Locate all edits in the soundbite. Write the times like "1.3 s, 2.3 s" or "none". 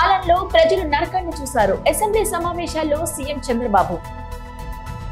4.0 s